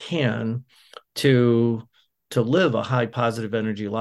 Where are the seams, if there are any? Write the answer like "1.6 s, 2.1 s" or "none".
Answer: 2.2 s, 3.1 s